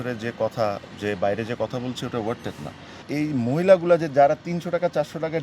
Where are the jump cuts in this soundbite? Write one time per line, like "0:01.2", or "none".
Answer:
0:03.1

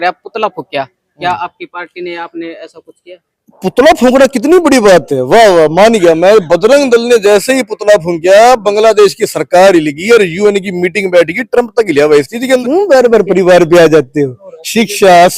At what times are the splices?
0:12.6

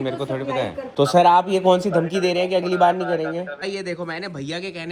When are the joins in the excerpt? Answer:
0:00.9
0:03.6

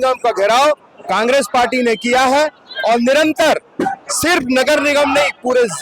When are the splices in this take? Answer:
none

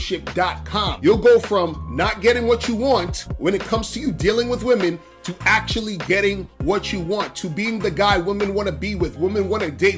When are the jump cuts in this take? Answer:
0:01.0

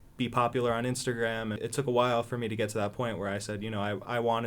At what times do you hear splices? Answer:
0:01.6

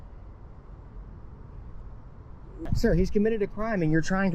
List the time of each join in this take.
0:02.7

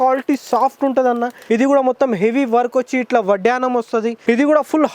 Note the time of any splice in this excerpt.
0:01.3
0:04.1

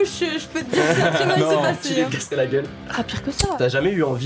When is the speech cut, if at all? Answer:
0:02.1
0:03.6

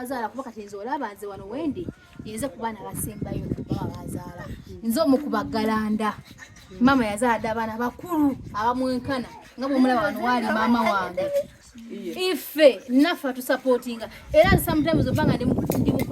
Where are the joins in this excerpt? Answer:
0:11.6

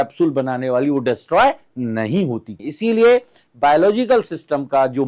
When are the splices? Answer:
0:02.5

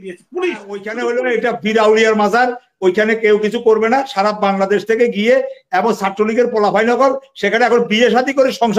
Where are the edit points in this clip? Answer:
0:00.9

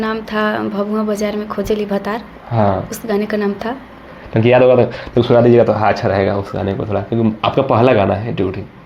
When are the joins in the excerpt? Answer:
none

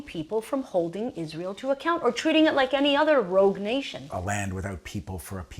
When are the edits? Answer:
0:04.1

